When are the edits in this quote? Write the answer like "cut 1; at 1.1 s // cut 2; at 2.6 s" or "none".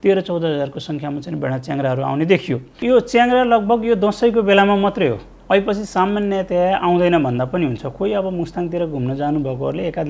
cut 1; at 2.7 s

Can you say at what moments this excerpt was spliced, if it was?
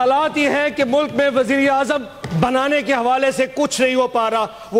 none

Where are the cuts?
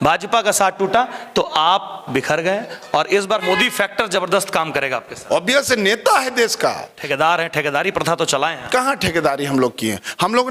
cut 1; at 3.4 s // cut 2; at 7.0 s

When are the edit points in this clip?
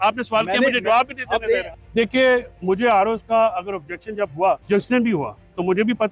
cut 1; at 1.8 s // cut 2; at 4.6 s

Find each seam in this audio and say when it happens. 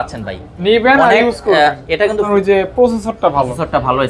cut 1; at 2.3 s

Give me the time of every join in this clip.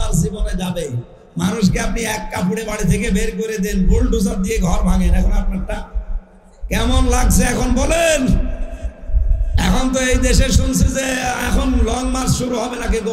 none

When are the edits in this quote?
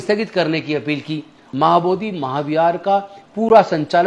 cut 1; at 1.4 s

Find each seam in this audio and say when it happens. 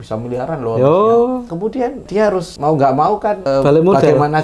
cut 1; at 2.0 s // cut 2; at 3.4 s

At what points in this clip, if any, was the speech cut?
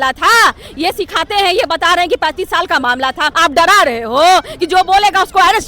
cut 1; at 3.3 s

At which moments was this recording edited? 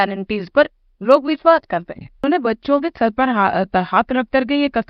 cut 1; at 2.2 s

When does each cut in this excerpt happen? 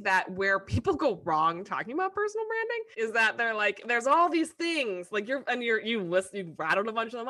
cut 1; at 2.9 s

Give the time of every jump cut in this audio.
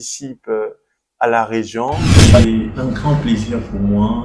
cut 1; at 2.1 s

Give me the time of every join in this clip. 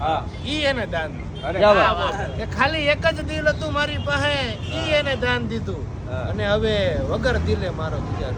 none

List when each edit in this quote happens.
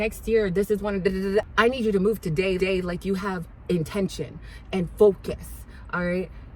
none

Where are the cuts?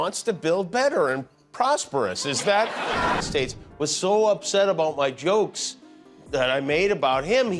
cut 1; at 3.2 s

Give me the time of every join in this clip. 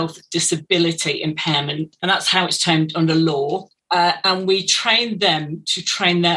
cut 1; at 1.9 s // cut 2; at 3.7 s

